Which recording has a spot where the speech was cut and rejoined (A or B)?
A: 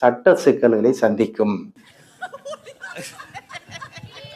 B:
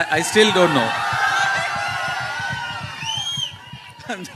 A